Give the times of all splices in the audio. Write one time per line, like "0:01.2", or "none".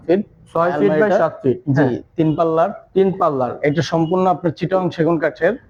none